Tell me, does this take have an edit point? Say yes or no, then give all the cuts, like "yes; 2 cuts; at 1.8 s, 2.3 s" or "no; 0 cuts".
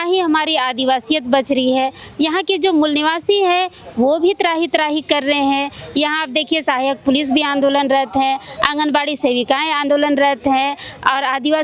no; 0 cuts